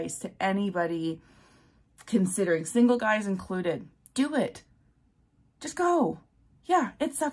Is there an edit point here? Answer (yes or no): yes